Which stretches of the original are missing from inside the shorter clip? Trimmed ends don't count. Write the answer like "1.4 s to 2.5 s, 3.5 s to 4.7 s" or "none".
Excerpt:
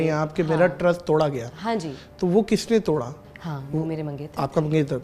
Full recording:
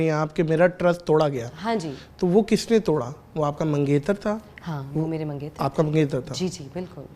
3.2 s to 4.5 s